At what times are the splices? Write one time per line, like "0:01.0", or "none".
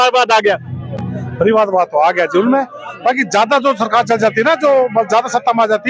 none